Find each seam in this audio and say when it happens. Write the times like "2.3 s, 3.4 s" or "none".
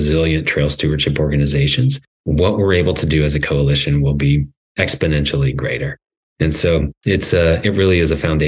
2.1 s, 4.6 s